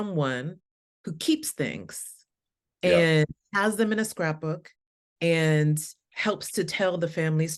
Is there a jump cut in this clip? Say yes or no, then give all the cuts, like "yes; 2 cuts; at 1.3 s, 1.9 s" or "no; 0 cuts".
no; 0 cuts